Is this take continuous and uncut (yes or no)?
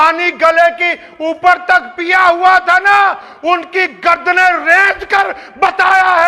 yes